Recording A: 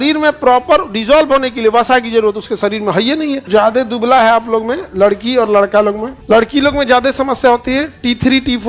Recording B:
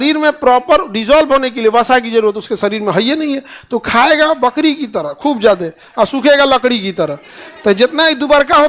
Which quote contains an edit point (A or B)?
A